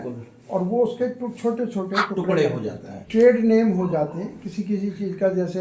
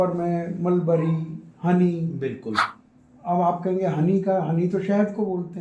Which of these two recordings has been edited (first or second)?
first